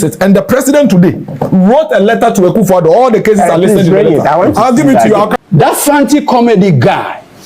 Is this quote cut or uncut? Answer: cut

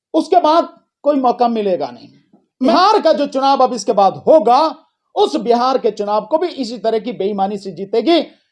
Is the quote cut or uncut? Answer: cut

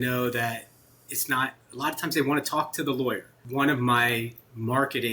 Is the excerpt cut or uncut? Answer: cut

